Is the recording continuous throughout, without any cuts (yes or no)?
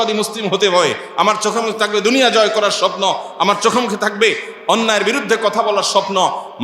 no